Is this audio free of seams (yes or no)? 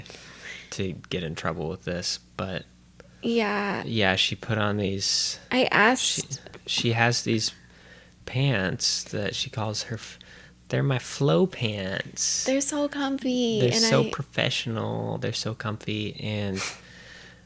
yes